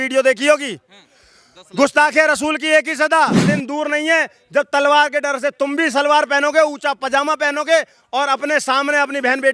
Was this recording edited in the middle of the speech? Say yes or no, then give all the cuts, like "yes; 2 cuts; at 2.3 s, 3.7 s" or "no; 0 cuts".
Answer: yes; 1 cut; at 3.5 s